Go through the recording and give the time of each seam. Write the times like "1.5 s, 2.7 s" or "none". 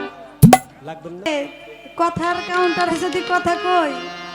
1.3 s